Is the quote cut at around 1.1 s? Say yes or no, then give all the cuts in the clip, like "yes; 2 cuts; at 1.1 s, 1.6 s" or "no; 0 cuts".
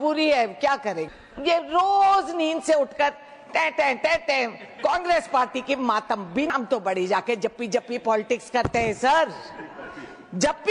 yes; 2 cuts; at 1.1 s, 6.5 s